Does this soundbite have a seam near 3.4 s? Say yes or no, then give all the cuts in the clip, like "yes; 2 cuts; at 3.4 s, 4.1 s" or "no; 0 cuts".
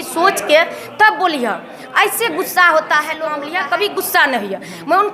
yes; 1 cut; at 3.4 s